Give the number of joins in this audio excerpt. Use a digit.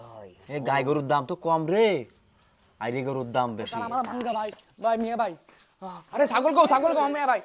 1